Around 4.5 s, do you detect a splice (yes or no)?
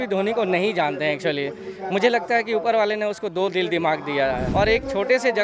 yes